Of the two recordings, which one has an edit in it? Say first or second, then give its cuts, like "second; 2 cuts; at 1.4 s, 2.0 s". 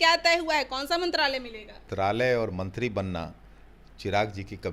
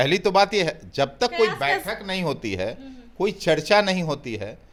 first; 1 cut; at 1.9 s